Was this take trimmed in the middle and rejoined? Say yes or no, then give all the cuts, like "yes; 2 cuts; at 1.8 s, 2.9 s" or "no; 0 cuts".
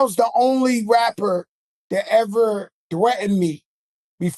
no; 0 cuts